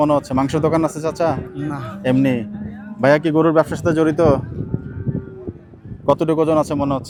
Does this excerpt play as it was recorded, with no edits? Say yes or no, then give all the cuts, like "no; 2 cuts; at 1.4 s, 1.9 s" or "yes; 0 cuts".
yes; 0 cuts